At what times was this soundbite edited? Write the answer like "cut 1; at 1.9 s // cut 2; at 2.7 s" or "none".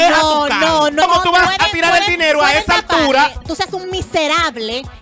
cut 1; at 1.0 s // cut 2; at 3.5 s